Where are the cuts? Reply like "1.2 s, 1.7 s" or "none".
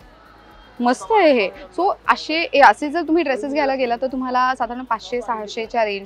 none